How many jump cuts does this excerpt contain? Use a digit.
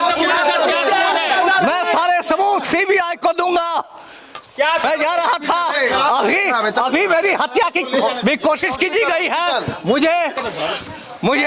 1